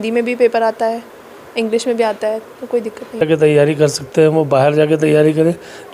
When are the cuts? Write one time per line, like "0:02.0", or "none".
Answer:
0:03.2

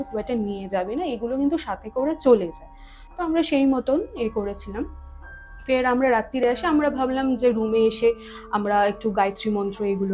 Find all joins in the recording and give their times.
none

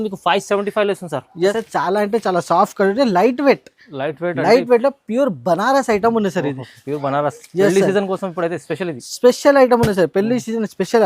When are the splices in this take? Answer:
0:01.6

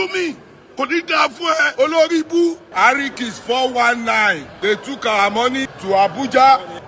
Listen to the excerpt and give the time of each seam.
0:01.7

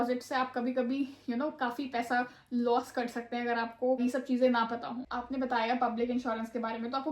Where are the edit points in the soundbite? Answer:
0:04.0
0:05.1

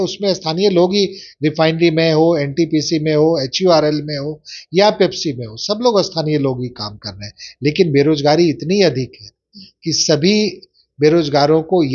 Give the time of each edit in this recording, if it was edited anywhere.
none

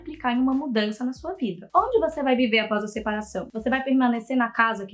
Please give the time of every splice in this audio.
0:01.6

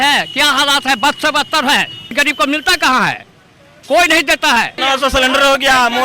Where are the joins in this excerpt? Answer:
0:02.1
0:04.7

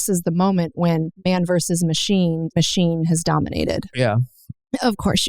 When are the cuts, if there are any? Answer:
0:01.1
0:02.5
0:03.9

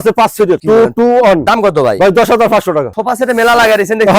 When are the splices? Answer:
0:01.4
0:02.9

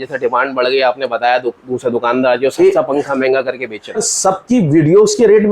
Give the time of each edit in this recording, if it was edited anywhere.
0:04.0

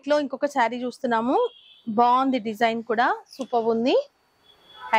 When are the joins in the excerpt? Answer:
none

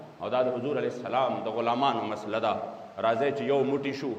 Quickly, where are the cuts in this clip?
none

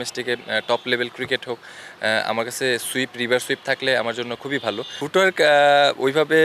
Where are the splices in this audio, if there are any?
0:04.9

